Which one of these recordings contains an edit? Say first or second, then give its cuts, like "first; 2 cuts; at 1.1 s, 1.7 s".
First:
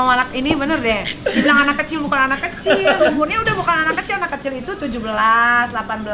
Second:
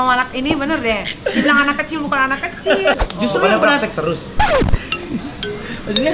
second; 1 cut; at 3.0 s